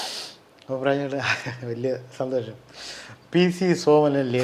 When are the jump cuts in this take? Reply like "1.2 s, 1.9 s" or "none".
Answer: none